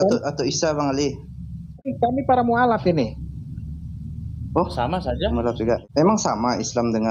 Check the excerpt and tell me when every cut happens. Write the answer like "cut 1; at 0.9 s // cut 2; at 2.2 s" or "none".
cut 1; at 1.9 s // cut 2; at 5.8 s